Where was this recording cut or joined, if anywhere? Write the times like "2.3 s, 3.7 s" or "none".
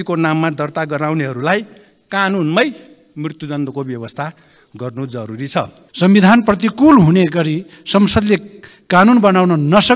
5.8 s